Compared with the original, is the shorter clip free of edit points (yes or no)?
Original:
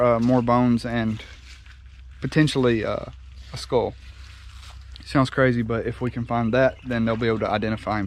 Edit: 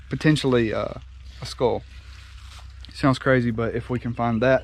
yes